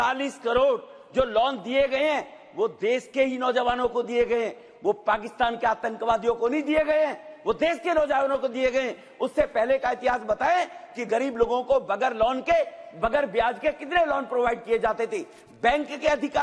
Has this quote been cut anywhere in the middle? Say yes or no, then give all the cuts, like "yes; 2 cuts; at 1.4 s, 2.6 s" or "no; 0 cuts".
no; 0 cuts